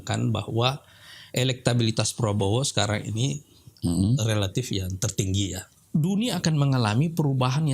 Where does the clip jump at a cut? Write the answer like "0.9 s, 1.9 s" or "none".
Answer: 5.7 s

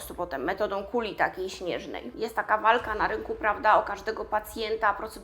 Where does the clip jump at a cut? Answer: 2.1 s

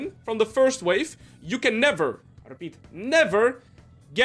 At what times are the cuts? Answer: none

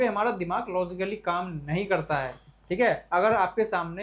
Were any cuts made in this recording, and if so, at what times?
none

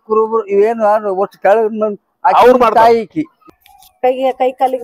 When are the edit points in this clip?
3.5 s

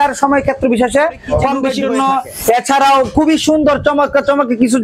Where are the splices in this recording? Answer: 1.7 s

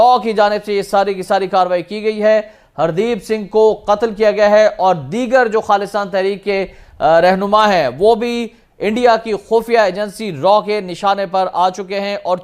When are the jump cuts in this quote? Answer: none

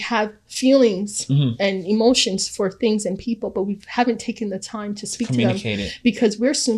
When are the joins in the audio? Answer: none

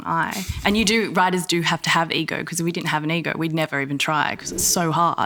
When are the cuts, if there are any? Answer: none

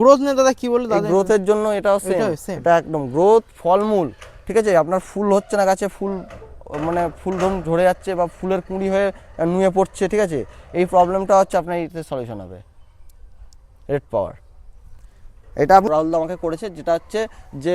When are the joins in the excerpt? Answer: 15.8 s

